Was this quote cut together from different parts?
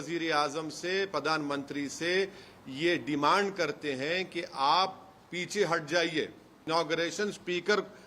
yes; 1 cut; at 6.6 s

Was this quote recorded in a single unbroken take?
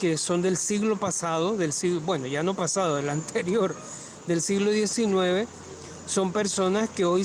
yes; 0 cuts

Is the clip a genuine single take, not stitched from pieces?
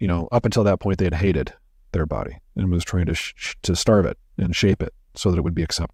yes; 0 cuts

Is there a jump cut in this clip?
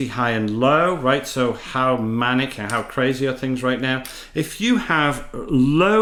no; 0 cuts

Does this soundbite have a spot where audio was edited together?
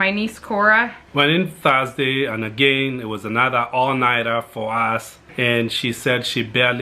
yes; 2 cuts; at 1.0 s, 5.2 s

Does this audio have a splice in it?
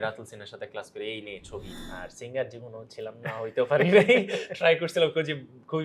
yes; 1 cut; at 1.8 s

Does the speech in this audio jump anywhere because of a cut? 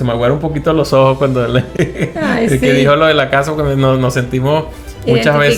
no; 0 cuts

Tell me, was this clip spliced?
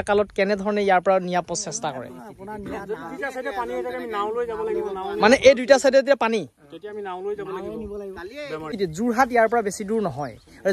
yes; 1 cut; at 8.7 s

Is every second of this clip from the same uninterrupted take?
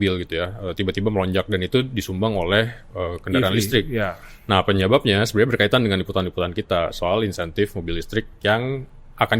yes; 0 cuts

